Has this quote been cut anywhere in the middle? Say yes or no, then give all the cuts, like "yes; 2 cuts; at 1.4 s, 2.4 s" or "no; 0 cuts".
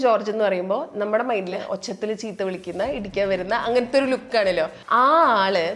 yes; 2 cuts; at 1.6 s, 4.8 s